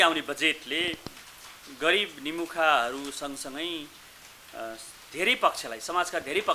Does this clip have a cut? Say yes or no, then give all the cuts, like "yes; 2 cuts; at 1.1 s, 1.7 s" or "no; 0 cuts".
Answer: no; 0 cuts